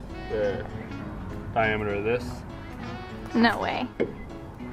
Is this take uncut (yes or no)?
yes